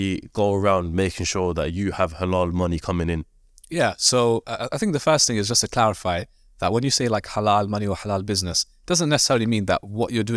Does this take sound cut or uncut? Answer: uncut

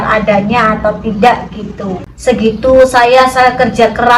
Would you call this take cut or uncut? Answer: cut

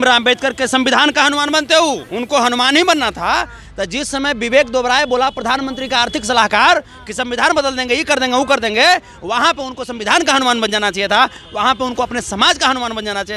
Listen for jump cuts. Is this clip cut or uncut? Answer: cut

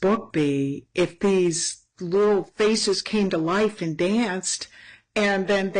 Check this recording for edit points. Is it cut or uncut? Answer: uncut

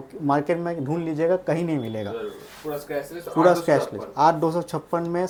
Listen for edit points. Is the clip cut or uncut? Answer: uncut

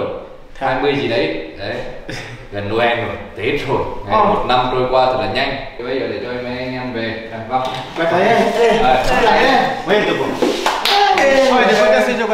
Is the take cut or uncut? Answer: cut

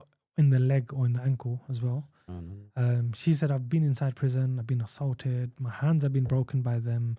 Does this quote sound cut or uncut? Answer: uncut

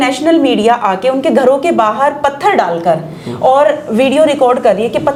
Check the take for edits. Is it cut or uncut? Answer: uncut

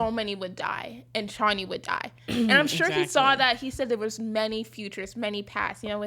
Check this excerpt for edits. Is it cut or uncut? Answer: uncut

